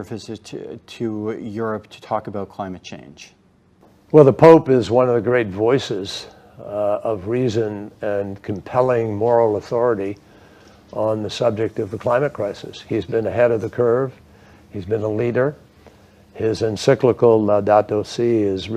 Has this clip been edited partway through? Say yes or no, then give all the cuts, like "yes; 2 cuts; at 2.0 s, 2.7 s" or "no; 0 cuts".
no; 0 cuts